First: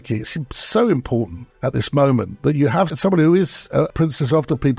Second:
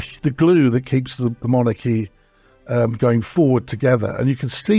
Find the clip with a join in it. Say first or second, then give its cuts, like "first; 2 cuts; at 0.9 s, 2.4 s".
first; 3 cuts; at 1.4 s, 2.9 s, 3.9 s